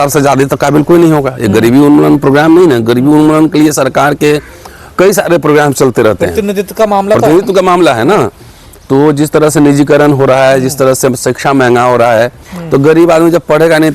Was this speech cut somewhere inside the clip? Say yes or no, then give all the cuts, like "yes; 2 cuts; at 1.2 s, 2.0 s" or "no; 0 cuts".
no; 0 cuts